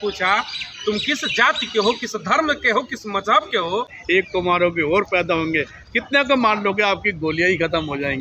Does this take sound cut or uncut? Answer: cut